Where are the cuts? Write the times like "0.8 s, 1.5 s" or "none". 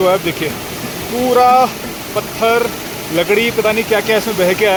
none